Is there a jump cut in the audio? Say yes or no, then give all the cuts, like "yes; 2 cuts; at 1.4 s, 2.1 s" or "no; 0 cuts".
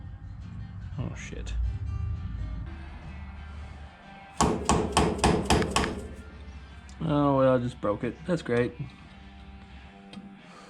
yes; 1 cut; at 2.7 s